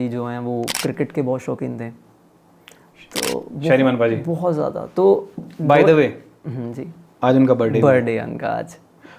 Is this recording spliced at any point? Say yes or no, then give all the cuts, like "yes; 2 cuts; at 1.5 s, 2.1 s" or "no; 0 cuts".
no; 0 cuts